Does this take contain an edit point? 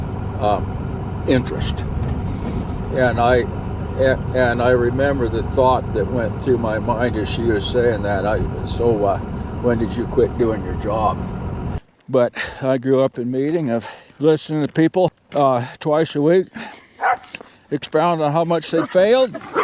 yes; 1 cut; at 11.8 s

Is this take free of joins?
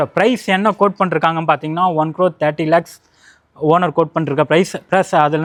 yes; 0 cuts

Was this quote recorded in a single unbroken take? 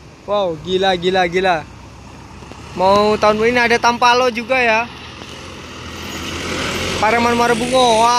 yes; 0 cuts

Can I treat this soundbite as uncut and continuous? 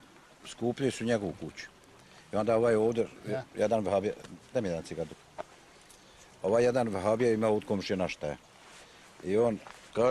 no; 1 cut; at 4.9 s

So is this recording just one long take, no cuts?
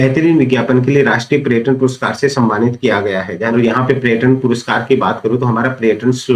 no; 1 cut; at 3.5 s

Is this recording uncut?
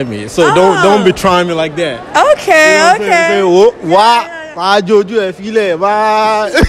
yes; 0 cuts

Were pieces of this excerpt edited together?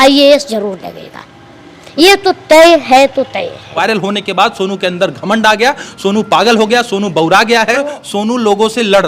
yes; 2 cuts; at 3.7 s, 7.9 s

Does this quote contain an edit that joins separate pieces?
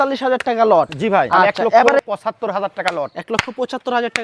yes; 1 cut; at 1.9 s

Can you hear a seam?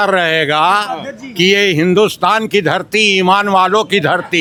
no; 0 cuts

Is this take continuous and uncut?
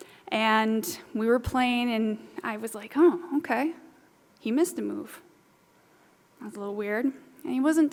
yes; 0 cuts

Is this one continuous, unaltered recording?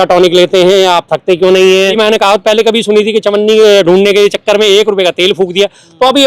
no; 1 cut; at 2.0 s

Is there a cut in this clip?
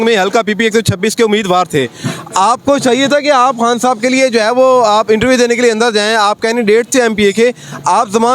no; 0 cuts

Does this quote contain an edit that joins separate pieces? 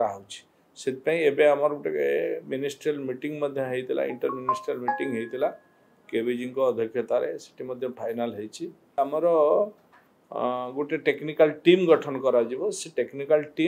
yes; 1 cut; at 9.0 s

